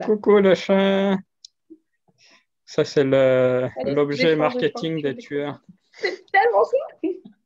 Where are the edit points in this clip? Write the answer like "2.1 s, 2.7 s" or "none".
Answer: none